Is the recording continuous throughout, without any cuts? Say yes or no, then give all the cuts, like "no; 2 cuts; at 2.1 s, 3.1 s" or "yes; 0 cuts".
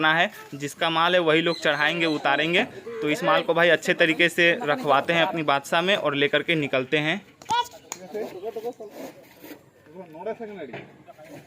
yes; 0 cuts